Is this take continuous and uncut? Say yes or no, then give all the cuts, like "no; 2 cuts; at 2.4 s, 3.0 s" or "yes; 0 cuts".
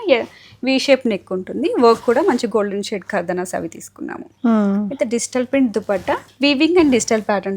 yes; 0 cuts